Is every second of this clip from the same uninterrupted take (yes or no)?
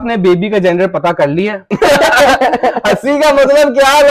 yes